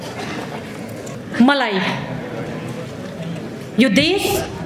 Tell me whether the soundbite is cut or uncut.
cut